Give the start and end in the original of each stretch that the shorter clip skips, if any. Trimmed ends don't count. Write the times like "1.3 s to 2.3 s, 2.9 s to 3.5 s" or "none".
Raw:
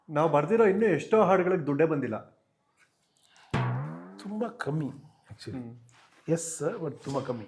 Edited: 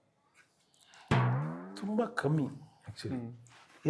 none